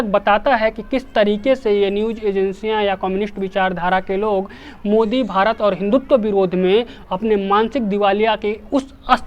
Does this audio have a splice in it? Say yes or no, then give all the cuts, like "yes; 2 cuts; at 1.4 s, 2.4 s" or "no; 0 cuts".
no; 0 cuts